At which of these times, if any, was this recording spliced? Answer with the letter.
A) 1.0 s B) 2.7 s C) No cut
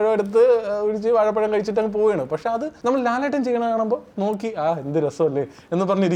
B